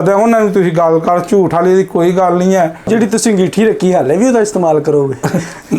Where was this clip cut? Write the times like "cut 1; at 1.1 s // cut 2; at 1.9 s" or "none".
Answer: cut 1; at 2.9 s